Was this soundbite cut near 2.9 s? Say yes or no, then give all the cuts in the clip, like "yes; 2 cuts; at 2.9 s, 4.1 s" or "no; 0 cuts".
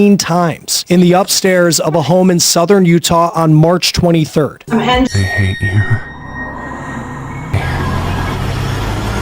no; 1 cut; at 5.1 s